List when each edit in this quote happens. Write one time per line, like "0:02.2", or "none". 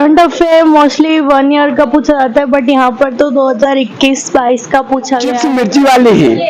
0:05.3

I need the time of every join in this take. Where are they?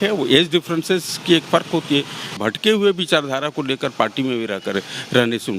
0:02.2

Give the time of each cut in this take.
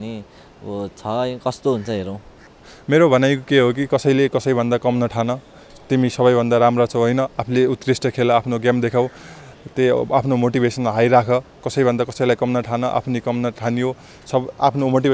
0:02.3

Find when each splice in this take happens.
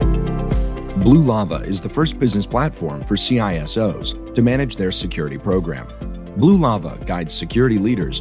0:00.9

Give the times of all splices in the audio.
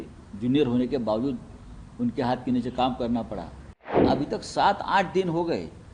0:04.0

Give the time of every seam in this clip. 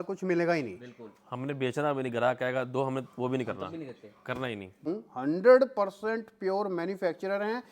0:04.9

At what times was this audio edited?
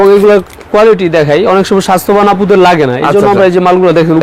none

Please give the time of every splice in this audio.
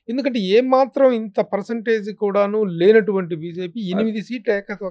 none

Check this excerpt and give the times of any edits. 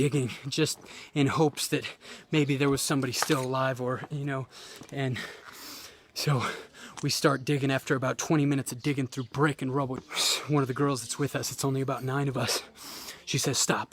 0:10.1

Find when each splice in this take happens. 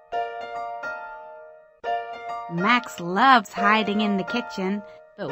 0:01.1
0:02.1

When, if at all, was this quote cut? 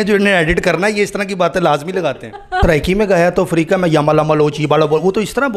0:02.6

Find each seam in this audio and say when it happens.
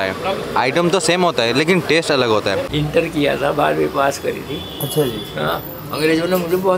0:02.7

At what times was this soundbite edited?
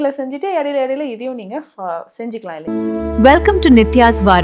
0:02.6

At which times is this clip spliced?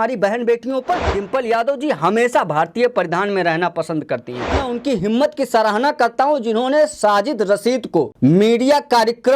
0:01.2
0:04.6
0:08.1

